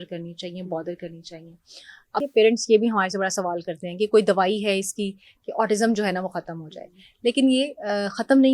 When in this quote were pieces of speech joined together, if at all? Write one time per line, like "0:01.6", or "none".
0:02.2